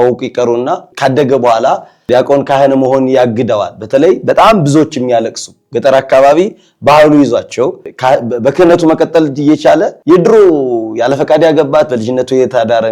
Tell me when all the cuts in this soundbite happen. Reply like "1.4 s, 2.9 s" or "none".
10.0 s